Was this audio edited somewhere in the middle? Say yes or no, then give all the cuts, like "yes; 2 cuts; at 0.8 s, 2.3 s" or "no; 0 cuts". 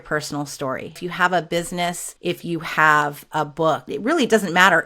yes; 3 cuts; at 1.0 s, 2.1 s, 3.9 s